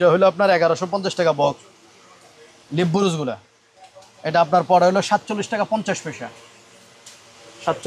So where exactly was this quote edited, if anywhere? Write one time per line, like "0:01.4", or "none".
none